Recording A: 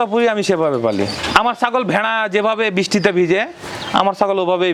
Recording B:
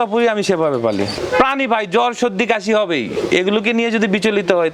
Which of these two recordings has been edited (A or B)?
B